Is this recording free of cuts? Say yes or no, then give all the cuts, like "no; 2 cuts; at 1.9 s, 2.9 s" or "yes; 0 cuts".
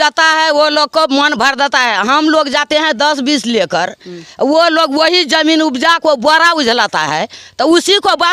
yes; 0 cuts